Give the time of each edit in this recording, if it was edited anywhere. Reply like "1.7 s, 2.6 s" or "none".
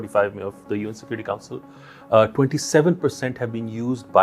none